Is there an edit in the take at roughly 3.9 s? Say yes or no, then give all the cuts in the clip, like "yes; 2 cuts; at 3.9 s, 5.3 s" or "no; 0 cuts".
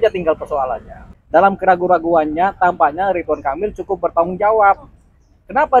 no; 1 cut; at 1.0 s